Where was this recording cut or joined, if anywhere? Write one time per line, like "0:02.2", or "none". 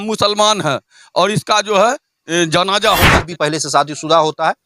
0:03.2

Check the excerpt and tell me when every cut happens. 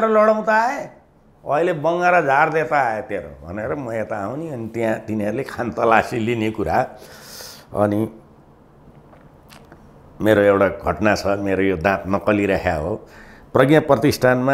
none

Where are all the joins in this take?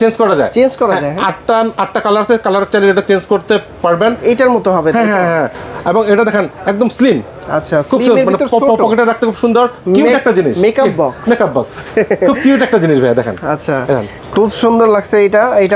none

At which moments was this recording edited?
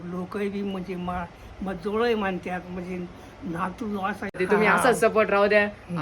0:04.4

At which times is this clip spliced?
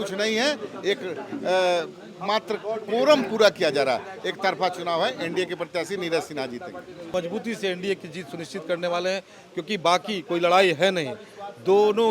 0:07.1

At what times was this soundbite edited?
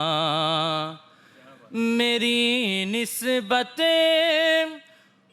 none

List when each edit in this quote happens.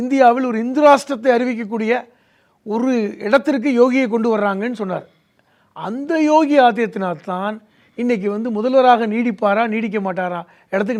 none

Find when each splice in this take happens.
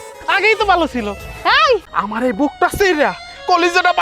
0:01.9

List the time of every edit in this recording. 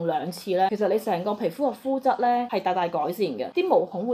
none

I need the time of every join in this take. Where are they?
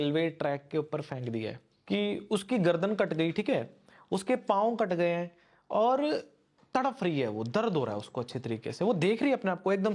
none

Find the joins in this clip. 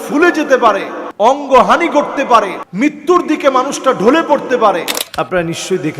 0:01.0
0:02.6
0:05.0

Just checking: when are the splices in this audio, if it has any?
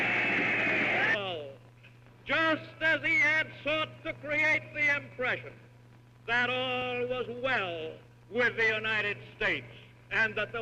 none

